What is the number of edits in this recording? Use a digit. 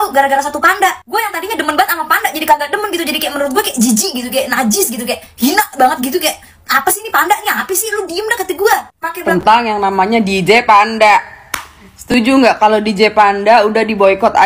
1